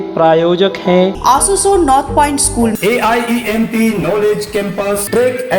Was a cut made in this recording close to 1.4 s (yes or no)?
no